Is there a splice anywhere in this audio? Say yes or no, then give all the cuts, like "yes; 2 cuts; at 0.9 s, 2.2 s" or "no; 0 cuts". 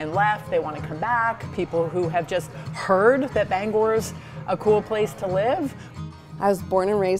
yes; 1 cut; at 6.0 s